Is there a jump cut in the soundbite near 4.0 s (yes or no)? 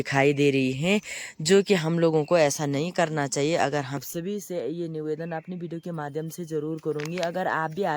yes